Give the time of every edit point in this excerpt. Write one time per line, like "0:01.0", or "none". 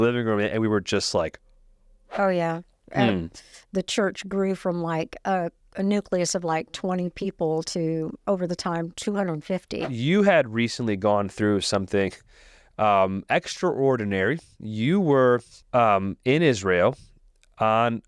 0:02.0
0:09.8
0:15.6